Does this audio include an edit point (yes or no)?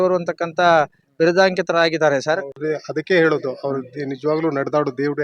yes